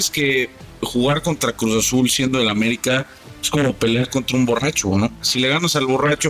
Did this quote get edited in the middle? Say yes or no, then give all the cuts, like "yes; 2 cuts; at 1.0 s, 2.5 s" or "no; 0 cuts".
yes; 1 cut; at 5.2 s